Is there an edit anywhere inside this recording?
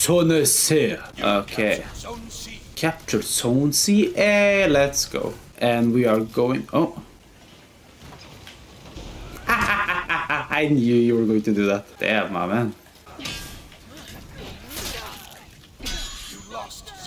no; 0 cuts

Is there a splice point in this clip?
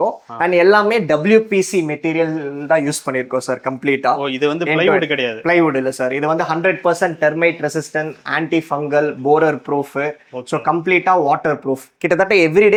no; 0 cuts

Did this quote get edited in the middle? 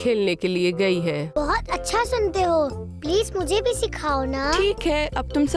yes; 1 cut; at 1.3 s

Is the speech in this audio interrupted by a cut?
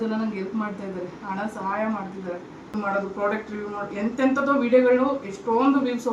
yes; 1 cut; at 2.7 s

